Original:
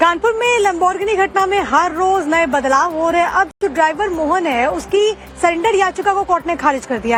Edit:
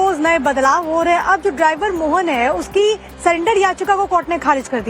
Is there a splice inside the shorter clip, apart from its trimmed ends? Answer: yes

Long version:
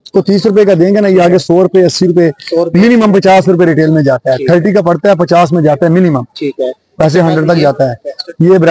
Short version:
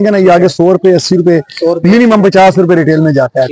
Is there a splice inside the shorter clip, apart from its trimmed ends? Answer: no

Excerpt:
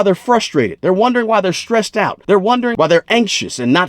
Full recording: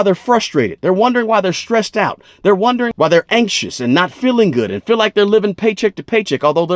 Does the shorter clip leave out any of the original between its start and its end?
yes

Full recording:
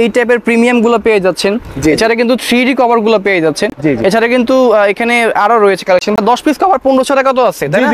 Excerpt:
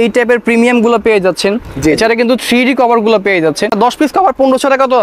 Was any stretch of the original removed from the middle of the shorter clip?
yes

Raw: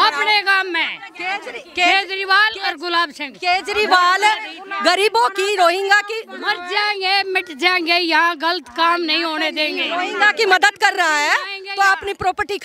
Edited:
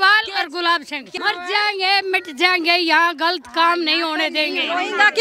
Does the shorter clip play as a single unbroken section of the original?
no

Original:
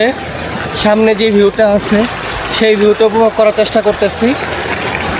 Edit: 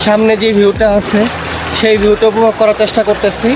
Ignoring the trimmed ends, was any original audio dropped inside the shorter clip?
no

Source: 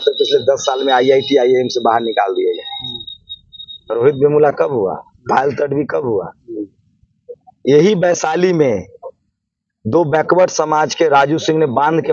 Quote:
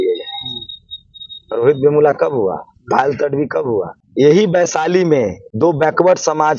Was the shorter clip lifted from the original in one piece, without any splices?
no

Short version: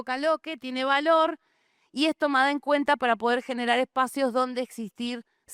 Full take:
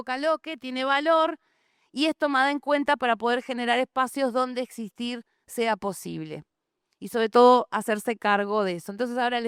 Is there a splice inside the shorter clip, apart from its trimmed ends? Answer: no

